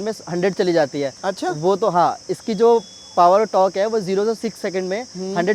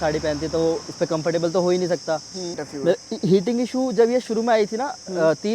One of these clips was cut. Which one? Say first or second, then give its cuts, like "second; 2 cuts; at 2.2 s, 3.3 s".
second; 1 cut; at 2.6 s